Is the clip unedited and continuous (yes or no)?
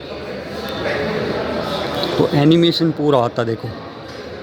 yes